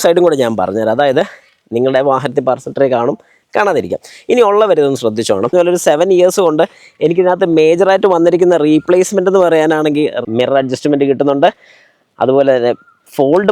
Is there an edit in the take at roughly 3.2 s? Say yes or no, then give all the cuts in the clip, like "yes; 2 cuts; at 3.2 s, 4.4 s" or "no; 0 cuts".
no; 2 cuts; at 5.5 s, 10.2 s